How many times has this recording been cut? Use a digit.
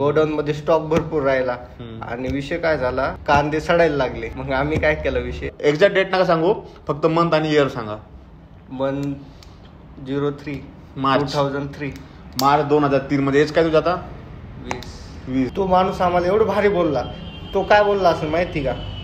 3